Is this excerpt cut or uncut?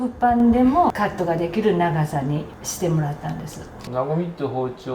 cut